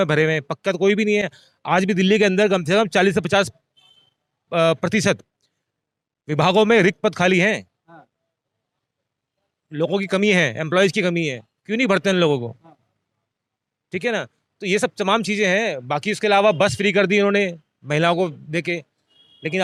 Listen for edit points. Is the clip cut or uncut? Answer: uncut